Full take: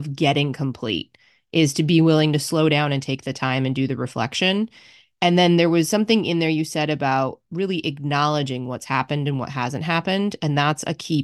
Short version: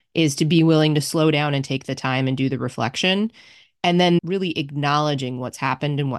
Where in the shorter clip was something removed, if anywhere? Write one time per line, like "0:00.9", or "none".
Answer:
0:04.2